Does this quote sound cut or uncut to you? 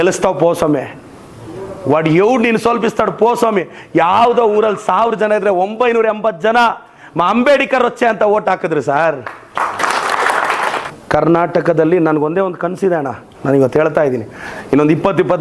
uncut